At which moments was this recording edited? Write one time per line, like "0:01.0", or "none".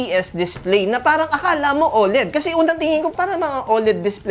0:03.1